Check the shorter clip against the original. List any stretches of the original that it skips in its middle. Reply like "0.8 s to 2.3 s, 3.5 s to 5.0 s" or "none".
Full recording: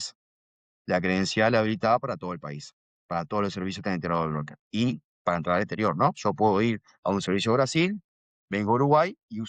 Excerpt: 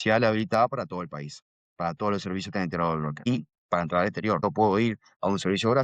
4.6 s to 4.8 s, 5.9 s to 6.2 s